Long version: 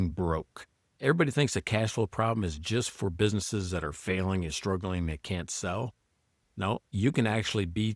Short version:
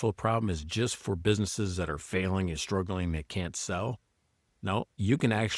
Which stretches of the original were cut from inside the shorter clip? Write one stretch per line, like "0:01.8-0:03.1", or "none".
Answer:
none